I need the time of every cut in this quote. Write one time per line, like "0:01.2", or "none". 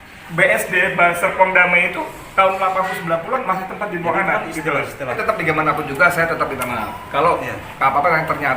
0:05.2